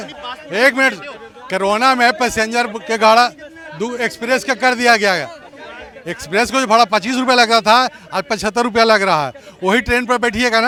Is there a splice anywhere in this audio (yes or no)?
no